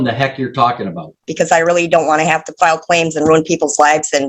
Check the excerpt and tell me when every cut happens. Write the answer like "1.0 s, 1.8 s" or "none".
1.3 s